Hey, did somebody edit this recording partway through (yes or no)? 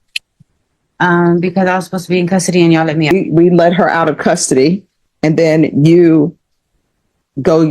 yes